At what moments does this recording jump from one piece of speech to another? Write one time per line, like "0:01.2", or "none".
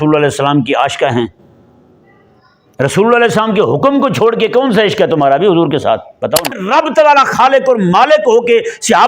0:06.6